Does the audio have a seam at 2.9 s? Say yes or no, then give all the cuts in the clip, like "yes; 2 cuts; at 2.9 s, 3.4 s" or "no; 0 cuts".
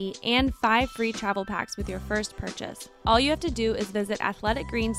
yes; 1 cut; at 2.9 s